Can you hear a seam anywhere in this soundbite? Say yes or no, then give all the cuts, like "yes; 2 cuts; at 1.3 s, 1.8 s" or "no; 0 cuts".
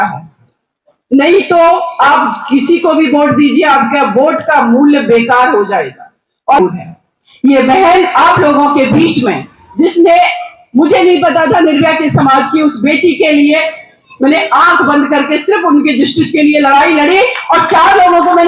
yes; 1 cut; at 6.6 s